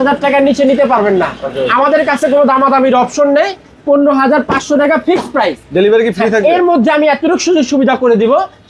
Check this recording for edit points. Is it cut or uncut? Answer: uncut